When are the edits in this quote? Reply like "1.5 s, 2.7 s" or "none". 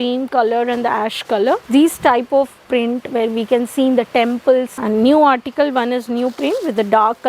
1.7 s, 4.7 s